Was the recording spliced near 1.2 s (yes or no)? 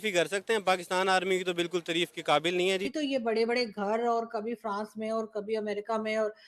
no